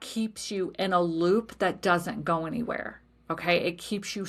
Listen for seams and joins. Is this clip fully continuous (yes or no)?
yes